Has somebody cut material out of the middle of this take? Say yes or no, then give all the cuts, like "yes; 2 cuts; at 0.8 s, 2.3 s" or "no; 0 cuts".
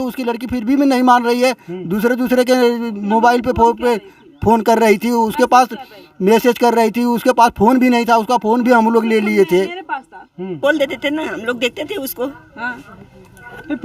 yes; 1 cut; at 10.6 s